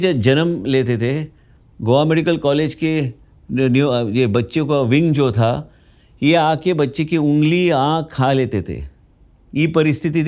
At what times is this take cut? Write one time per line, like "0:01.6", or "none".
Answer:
none